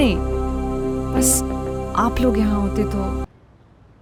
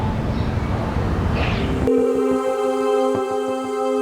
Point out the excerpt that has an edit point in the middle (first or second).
second